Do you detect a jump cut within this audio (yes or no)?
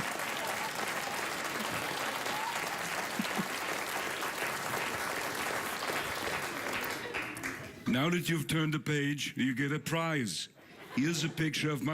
yes